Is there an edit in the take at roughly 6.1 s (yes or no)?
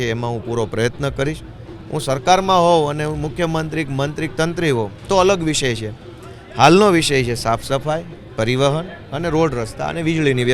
no